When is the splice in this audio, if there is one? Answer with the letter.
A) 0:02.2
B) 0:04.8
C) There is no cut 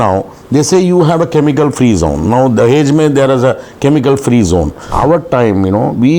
B